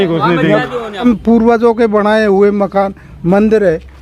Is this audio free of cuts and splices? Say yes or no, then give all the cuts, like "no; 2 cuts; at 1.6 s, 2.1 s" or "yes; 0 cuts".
no; 1 cut; at 1.0 s